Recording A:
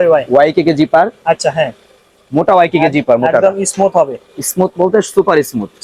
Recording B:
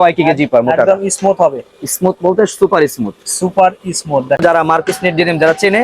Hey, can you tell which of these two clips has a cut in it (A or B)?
B